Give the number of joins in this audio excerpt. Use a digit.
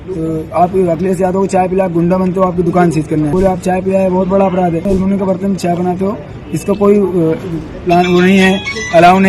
2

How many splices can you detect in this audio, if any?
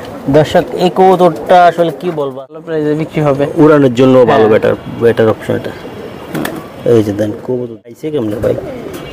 2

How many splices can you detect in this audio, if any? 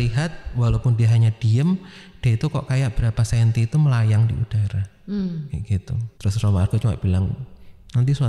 1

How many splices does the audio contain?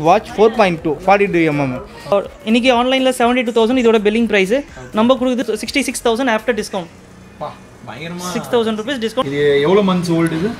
2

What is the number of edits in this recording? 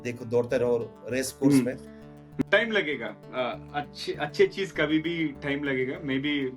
1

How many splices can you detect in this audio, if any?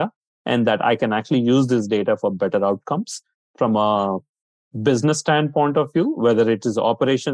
0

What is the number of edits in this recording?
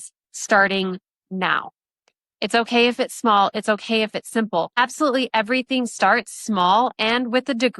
1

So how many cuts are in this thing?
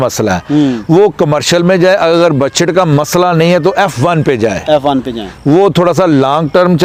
0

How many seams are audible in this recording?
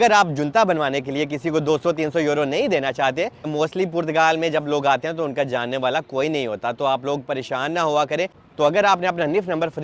2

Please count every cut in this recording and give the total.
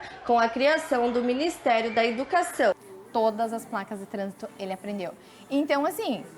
1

